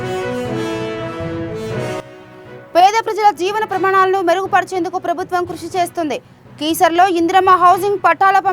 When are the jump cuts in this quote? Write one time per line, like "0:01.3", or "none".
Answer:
0:02.0